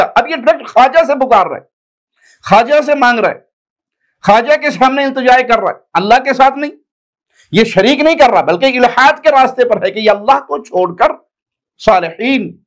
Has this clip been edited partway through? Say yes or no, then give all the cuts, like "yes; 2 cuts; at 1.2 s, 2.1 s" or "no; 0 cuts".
no; 0 cuts